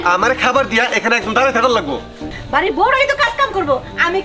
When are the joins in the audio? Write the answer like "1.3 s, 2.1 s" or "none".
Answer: 2.3 s